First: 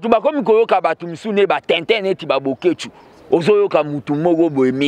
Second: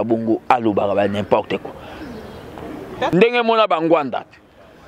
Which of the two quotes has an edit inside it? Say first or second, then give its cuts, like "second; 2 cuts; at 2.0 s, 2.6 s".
second; 1 cut; at 3.1 s